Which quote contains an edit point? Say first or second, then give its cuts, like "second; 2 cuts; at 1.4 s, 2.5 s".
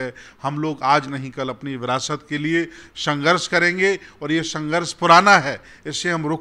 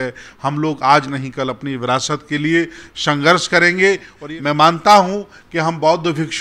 second; 1 cut; at 4.1 s